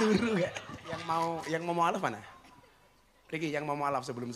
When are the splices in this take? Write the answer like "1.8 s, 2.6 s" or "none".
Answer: 1.1 s

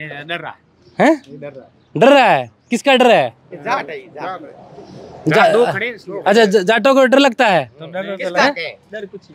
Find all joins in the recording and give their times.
none

